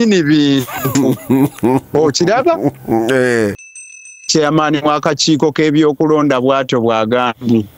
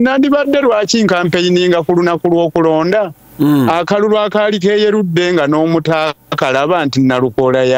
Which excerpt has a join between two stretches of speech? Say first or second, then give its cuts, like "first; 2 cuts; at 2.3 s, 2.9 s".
first; 1 cut; at 3.6 s